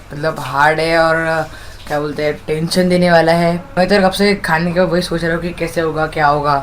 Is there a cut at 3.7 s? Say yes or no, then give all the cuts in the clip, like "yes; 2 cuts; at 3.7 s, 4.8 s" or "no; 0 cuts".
yes; 1 cut; at 3.7 s